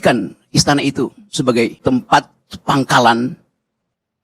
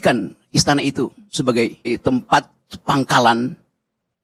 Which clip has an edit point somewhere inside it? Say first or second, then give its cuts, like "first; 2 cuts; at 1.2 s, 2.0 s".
first; 1 cut; at 1.8 s